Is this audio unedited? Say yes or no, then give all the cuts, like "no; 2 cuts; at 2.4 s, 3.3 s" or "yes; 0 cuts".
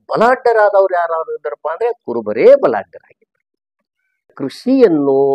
no; 1 cut; at 4.3 s